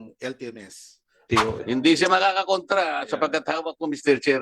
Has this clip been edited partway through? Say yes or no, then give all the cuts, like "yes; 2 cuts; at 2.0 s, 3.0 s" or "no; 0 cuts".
yes; 1 cut; at 1.3 s